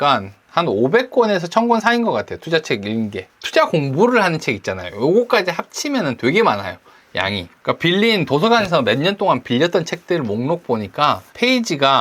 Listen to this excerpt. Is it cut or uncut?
cut